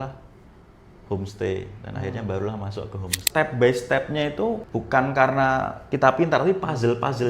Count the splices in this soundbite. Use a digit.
2